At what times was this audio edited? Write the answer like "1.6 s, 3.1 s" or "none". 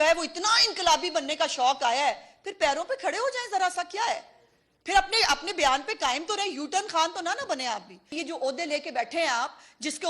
8.1 s